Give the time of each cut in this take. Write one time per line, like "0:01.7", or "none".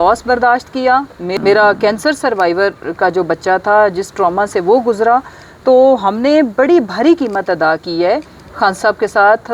0:01.2